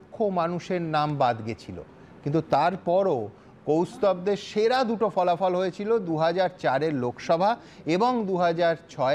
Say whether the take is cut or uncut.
uncut